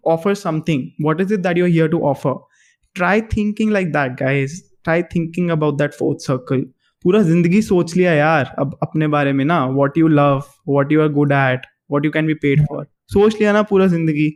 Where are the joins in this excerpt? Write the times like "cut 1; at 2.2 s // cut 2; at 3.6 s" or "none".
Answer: none